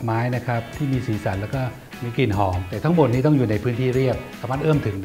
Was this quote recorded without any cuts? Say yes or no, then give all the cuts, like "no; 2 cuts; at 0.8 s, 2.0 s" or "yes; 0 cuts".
yes; 0 cuts